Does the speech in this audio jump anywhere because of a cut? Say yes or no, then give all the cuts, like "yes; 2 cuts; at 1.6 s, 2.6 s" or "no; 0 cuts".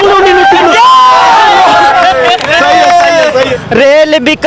yes; 1 cut; at 3.5 s